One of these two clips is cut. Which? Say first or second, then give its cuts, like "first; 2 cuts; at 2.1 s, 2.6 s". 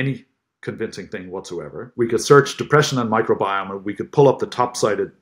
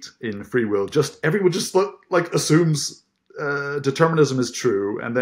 first; 1 cut; at 1.8 s